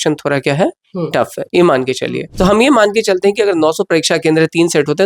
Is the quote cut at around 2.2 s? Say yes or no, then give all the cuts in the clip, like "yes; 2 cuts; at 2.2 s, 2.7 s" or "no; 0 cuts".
yes; 1 cut; at 2.2 s